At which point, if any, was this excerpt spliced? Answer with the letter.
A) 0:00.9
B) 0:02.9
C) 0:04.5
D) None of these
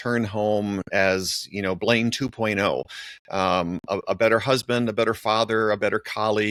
D